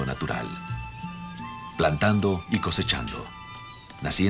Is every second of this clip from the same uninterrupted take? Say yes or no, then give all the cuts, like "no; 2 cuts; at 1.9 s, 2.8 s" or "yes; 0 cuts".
yes; 0 cuts